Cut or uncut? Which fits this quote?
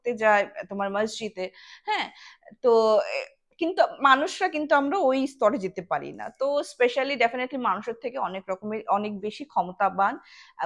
uncut